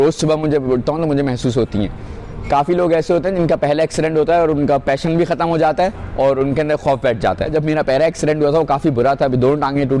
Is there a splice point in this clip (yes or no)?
yes